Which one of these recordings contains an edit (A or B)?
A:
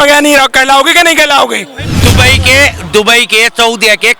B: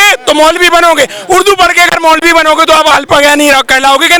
A